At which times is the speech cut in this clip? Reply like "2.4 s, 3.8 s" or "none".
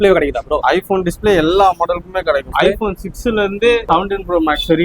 2.5 s, 3.9 s